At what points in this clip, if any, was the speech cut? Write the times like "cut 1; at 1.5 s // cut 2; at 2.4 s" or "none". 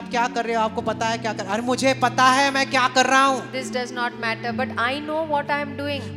none